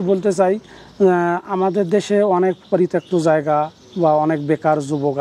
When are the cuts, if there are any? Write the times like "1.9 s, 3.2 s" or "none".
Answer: none